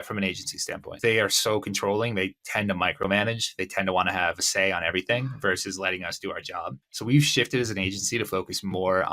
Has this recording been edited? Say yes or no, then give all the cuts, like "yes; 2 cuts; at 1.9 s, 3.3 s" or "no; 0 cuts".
yes; 2 cuts; at 1.0 s, 6.9 s